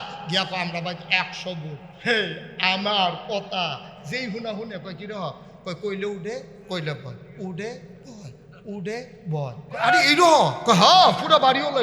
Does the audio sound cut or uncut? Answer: cut